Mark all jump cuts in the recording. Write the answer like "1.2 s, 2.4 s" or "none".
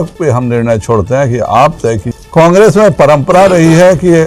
2.1 s